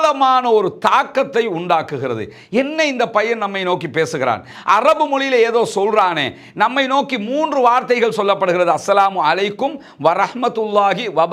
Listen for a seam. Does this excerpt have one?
no; 0 cuts

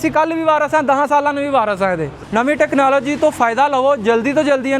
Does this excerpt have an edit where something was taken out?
yes; 1 cut; at 2.1 s

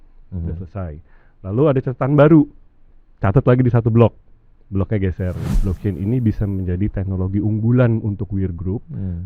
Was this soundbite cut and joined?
yes; 1 cut; at 5.5 s

